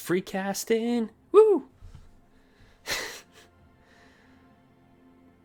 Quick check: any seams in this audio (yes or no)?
no